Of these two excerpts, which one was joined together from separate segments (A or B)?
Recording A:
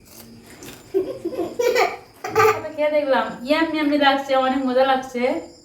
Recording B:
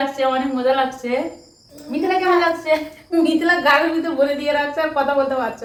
A